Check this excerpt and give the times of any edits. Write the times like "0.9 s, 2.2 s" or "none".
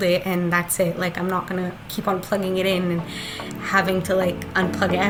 none